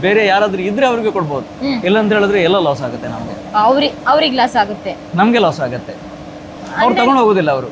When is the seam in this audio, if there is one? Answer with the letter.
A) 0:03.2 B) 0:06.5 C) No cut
C